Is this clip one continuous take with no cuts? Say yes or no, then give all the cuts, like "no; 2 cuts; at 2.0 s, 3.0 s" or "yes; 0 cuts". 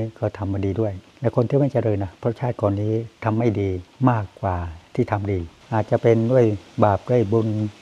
no; 1 cut; at 5.7 s